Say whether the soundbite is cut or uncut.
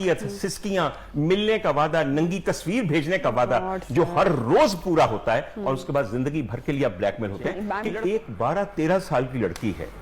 cut